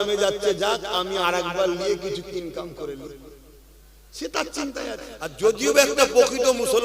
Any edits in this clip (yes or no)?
yes